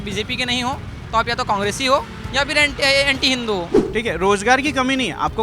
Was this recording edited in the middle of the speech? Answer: yes; 1 cut; at 3.7 s

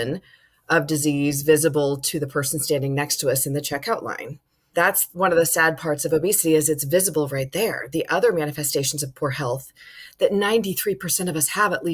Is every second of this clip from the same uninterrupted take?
no; 1 cut; at 4.6 s

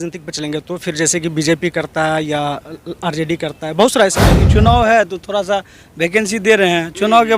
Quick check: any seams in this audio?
yes; 1 cut; at 4.4 s

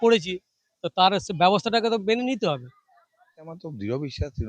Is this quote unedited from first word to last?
no; 1 cut; at 3.5 s

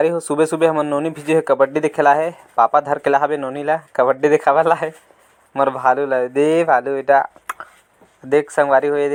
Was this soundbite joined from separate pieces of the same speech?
no; 0 cuts

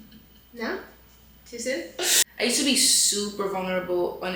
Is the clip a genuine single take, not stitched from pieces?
no; 1 cut; at 2.2 s

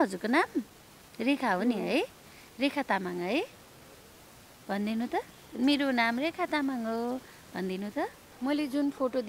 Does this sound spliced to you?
yes; 1 cut; at 8.2 s

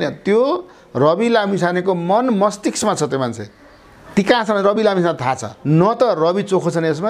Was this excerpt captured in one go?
no; 1 cut; at 5.5 s

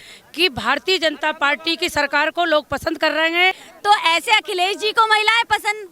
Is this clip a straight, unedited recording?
no; 1 cut; at 3.7 s

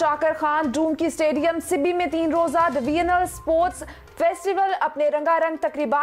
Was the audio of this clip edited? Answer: no; 0 cuts

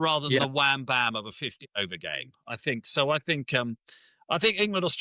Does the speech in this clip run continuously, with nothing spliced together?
yes; 0 cuts

